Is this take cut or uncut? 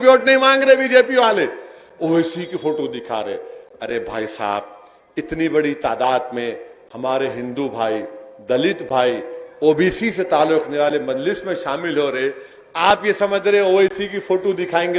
uncut